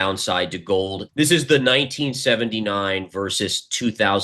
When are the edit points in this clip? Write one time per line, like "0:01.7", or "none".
0:01.0